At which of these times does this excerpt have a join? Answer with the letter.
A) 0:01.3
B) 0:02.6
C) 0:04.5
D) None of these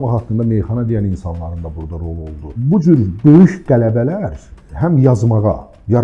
B